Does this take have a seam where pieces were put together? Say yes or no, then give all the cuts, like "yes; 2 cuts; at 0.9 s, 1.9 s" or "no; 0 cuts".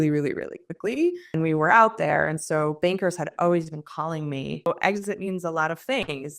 yes; 2 cuts; at 1.2 s, 4.7 s